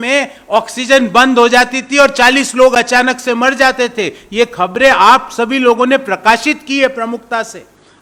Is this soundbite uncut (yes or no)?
yes